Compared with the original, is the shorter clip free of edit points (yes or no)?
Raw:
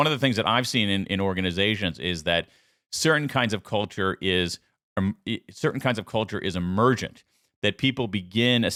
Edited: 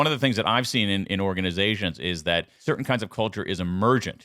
no